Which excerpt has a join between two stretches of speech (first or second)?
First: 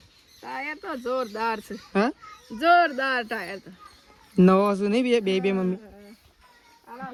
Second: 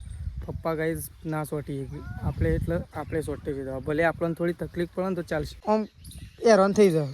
second